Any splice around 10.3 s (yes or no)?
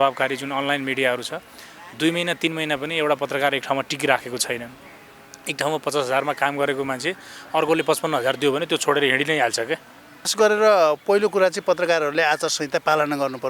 yes